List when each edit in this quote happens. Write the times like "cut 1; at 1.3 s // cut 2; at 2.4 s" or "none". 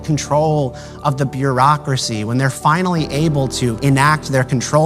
cut 1; at 3.8 s